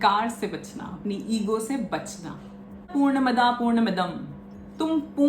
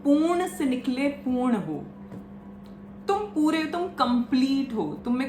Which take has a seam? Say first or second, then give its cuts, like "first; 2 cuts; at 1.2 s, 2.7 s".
first; 1 cut; at 2.9 s